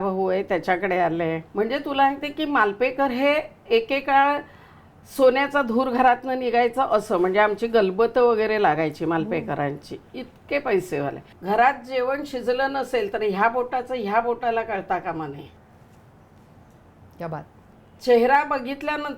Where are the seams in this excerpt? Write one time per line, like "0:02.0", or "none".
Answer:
0:01.4
0:11.3
0:15.6